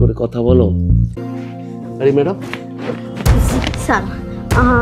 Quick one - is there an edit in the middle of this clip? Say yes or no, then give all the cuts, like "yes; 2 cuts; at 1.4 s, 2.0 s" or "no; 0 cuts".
yes; 1 cut; at 1.2 s